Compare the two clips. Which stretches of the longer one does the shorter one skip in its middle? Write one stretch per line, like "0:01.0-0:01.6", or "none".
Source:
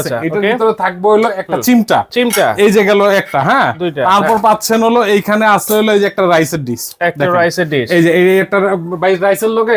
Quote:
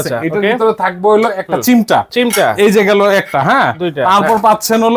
none